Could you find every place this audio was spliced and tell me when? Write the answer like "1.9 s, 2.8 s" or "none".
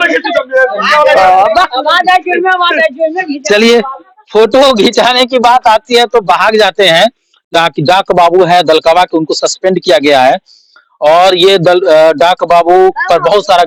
none